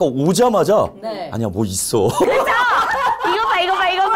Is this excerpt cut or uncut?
uncut